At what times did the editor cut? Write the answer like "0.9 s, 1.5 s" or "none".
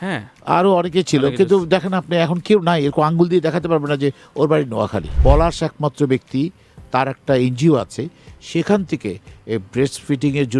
5.1 s